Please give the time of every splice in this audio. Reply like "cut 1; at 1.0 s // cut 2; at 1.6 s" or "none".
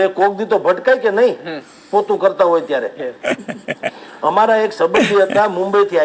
none